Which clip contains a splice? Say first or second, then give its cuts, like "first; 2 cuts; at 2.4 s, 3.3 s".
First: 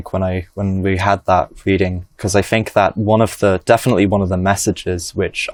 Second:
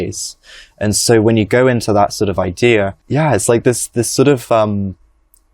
second; 1 cut; at 3.0 s